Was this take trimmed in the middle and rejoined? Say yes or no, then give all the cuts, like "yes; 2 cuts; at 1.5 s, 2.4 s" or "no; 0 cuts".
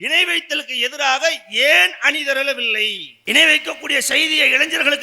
yes; 1 cut; at 3.2 s